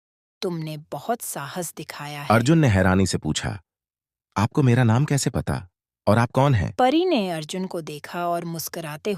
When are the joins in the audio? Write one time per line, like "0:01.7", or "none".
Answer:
0:02.2
0:06.7